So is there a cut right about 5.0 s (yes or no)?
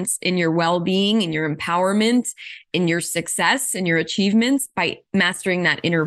yes